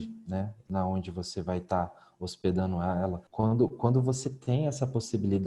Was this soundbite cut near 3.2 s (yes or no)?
yes